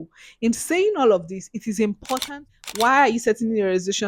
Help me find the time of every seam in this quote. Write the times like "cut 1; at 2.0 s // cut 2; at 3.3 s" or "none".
cut 1; at 2.3 s